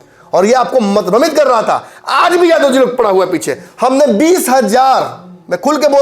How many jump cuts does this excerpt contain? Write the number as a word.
zero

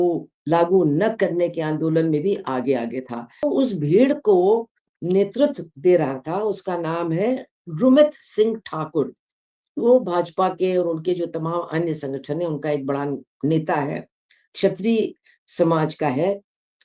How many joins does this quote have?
one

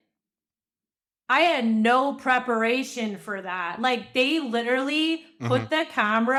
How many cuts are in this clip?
zero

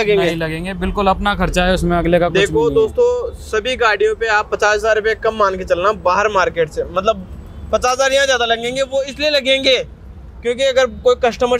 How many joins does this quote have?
zero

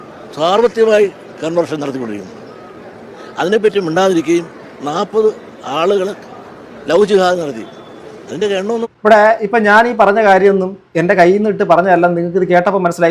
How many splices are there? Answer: zero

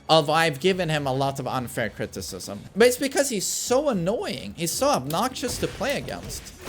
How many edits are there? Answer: one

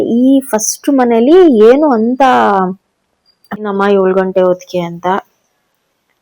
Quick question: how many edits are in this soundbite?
one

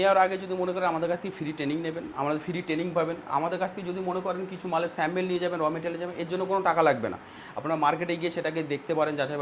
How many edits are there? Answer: zero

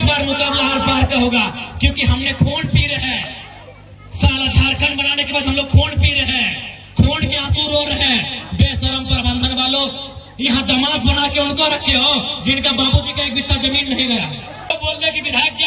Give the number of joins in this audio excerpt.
one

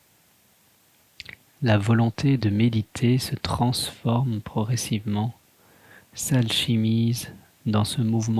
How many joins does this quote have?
two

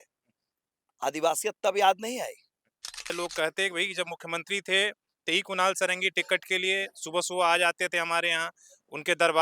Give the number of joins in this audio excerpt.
one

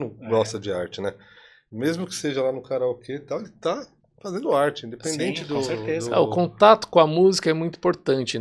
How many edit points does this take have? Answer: zero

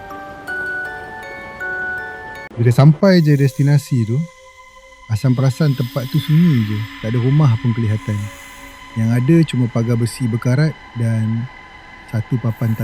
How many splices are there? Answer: one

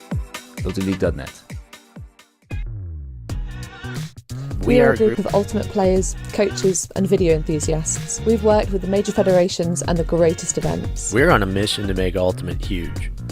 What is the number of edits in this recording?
one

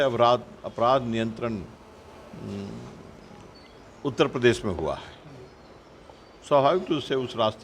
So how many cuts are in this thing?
zero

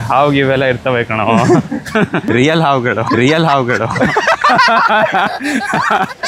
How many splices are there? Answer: zero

